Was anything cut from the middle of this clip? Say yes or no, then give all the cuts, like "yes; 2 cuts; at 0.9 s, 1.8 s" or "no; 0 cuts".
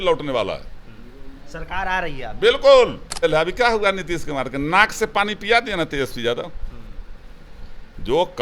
yes; 1 cut; at 3.2 s